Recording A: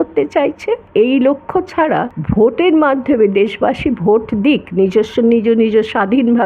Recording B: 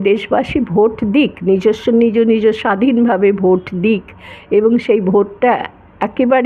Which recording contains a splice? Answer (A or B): A